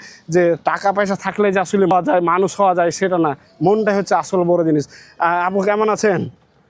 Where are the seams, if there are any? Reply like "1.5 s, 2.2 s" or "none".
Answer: 1.9 s